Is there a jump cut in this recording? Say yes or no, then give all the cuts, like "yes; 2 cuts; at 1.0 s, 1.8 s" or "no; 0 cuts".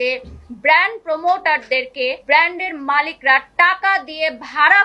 yes; 1 cut; at 2.2 s